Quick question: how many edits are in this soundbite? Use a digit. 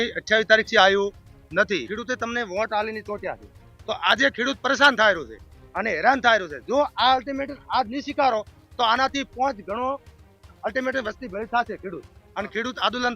1